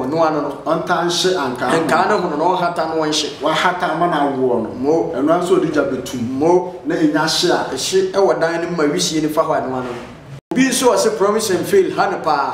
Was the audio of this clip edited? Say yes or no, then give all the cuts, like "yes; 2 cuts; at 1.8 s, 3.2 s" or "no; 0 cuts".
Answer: yes; 1 cut; at 10.5 s